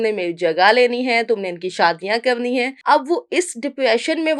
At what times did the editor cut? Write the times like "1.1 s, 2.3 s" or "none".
2.7 s